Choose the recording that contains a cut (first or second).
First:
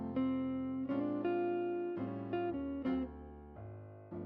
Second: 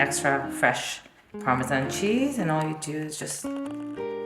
second